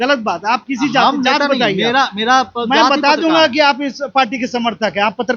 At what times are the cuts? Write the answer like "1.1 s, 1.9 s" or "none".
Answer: none